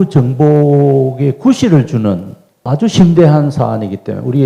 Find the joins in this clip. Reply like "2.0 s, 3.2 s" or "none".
none